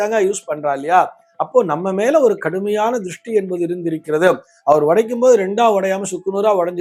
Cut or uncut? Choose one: uncut